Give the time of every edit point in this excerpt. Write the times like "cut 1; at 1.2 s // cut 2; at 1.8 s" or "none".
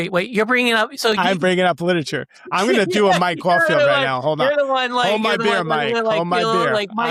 none